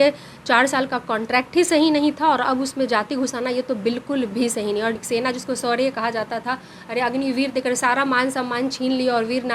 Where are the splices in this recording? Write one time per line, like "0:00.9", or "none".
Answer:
0:05.0